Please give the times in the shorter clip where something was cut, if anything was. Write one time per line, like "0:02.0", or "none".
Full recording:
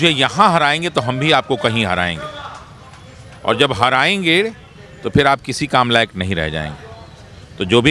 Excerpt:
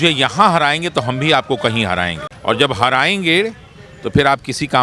0:02.3

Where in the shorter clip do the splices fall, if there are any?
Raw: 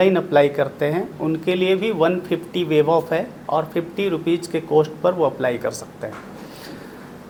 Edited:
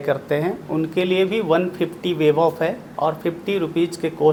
none

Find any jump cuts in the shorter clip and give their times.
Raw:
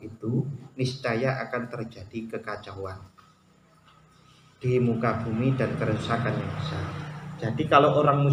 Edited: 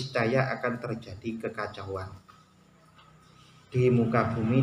none

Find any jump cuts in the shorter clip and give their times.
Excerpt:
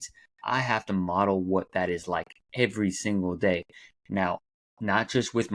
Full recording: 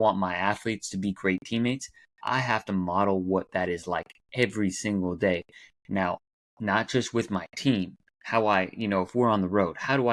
none

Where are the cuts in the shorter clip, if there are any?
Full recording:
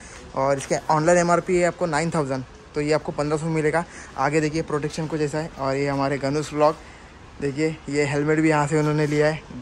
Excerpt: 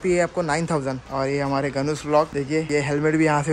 0:01.1
0:02.6

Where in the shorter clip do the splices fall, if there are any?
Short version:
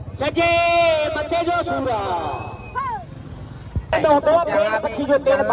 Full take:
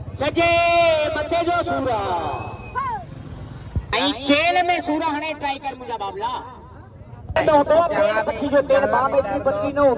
0:03.7

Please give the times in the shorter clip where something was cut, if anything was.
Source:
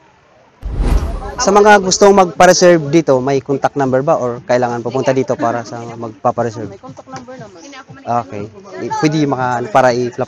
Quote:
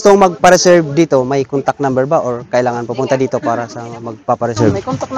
none

